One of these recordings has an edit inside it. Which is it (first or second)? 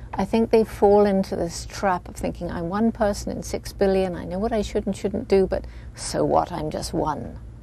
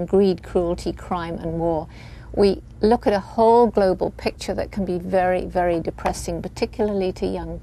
second